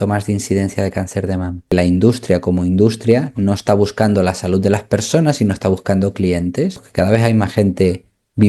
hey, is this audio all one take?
no; 2 cuts; at 1.7 s, 6.8 s

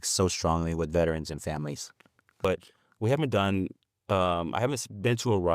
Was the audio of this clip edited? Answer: yes; 1 cut; at 2.4 s

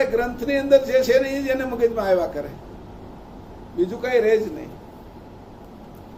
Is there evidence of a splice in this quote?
no; 0 cuts

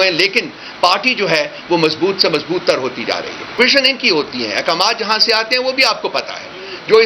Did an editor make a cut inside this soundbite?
yes; 1 cut; at 3.6 s

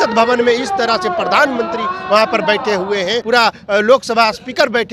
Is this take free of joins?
no; 1 cut; at 3.2 s

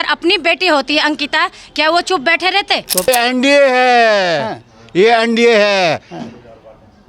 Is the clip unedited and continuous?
no; 1 cut; at 3.1 s

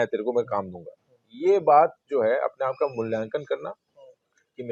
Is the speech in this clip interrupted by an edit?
no; 0 cuts

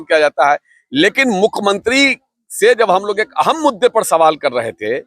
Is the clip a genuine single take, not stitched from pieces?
yes; 0 cuts

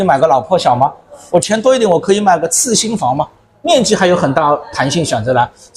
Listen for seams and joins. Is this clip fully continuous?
yes; 0 cuts

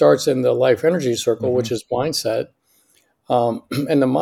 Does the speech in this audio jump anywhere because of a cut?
no; 0 cuts

